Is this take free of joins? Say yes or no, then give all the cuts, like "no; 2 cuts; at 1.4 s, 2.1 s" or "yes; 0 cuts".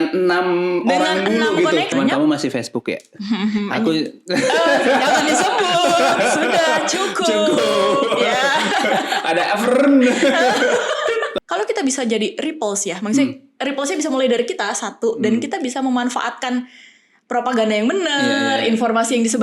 no; 2 cuts; at 1.9 s, 11.3 s